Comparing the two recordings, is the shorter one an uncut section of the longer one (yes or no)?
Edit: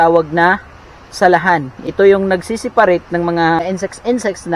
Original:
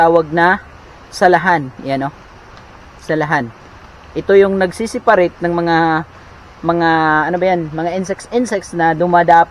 no